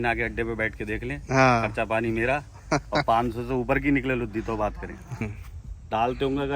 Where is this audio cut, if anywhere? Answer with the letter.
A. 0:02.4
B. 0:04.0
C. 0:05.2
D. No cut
C